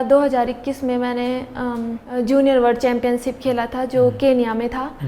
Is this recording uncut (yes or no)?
yes